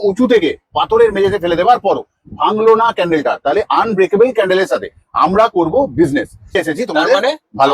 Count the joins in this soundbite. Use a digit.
1